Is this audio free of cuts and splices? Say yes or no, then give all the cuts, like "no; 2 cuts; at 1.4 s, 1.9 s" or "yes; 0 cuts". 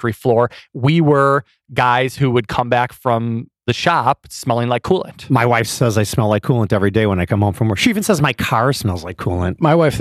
no; 1 cut; at 5.1 s